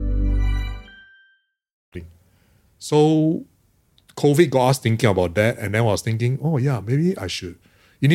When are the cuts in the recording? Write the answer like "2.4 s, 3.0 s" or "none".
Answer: none